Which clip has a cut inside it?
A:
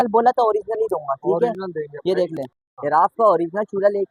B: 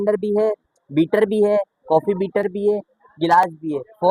A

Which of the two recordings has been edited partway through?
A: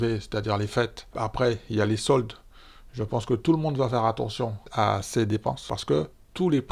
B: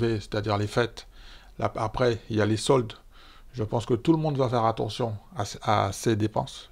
A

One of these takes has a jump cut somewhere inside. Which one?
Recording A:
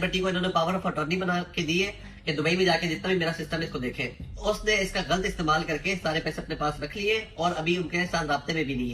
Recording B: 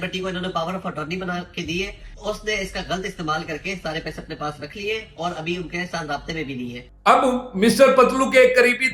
B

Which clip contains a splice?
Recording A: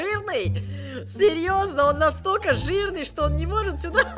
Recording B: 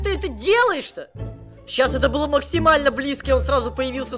B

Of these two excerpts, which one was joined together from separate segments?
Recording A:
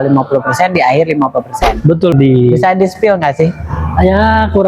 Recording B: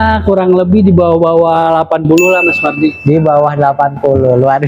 A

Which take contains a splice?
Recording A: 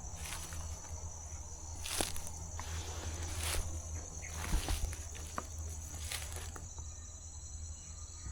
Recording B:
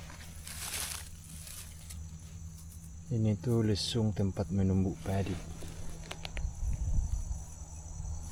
A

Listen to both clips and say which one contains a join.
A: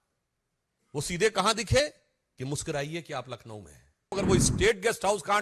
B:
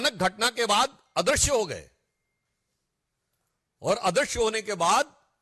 A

